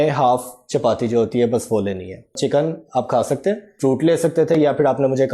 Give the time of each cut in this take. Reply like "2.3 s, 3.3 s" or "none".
2.4 s, 3.7 s

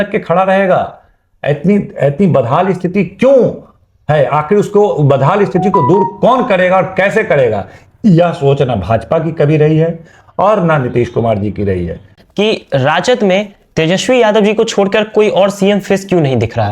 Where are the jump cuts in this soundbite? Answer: 12.1 s

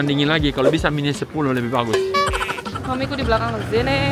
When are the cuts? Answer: 2.7 s

